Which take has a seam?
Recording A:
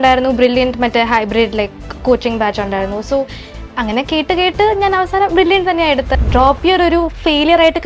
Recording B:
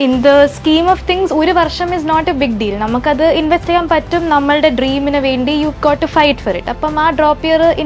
A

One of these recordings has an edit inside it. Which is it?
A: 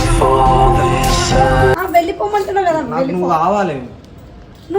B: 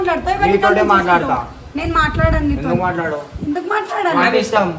A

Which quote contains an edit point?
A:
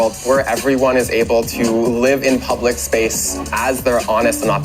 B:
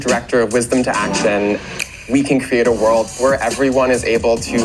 B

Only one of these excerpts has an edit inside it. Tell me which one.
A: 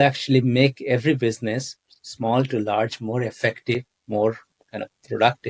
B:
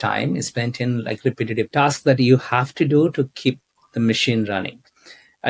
B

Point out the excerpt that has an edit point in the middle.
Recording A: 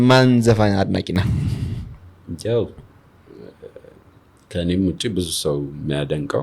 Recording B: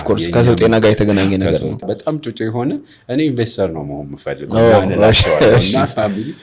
B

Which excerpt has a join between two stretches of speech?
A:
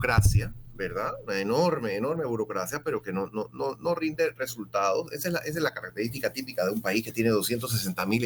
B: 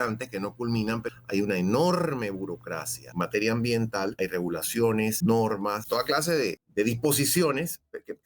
B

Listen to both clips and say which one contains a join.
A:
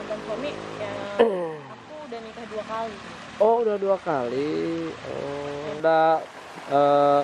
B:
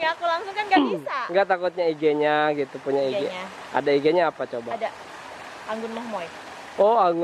A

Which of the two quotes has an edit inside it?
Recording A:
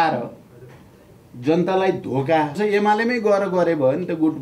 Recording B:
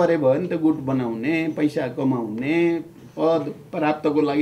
A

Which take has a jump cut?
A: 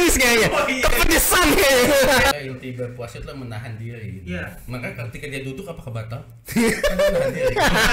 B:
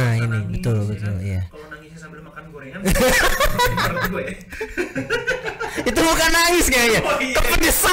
A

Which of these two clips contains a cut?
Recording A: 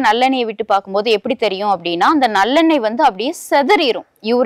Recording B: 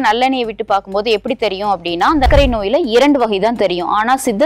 B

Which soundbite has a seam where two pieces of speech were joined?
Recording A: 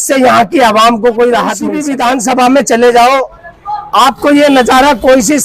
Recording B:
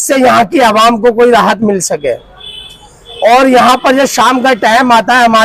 A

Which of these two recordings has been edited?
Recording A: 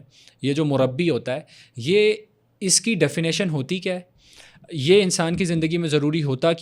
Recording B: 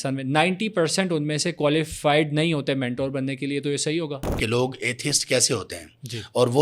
B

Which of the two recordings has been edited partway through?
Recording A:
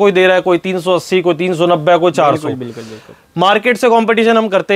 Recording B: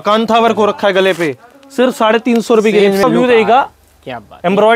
B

